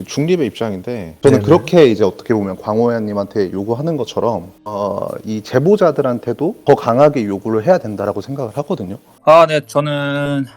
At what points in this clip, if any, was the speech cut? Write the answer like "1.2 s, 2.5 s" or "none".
1.1 s, 9.1 s